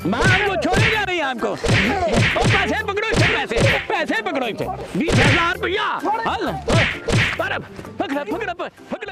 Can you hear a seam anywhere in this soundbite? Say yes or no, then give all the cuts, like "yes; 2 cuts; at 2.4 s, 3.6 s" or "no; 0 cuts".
no; 0 cuts